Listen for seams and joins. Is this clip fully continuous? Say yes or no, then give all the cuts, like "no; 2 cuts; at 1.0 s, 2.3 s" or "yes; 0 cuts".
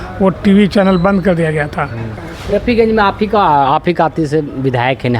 no; 1 cut; at 2.3 s